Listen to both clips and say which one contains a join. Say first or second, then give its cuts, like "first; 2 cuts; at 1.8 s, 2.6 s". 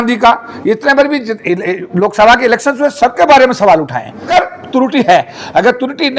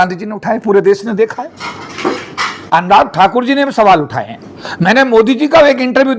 first; 1 cut; at 4.3 s